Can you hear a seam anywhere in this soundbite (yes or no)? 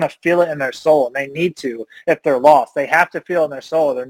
no